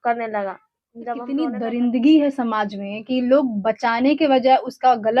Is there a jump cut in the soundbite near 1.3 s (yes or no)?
yes